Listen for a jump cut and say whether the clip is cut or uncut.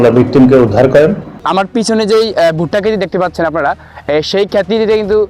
cut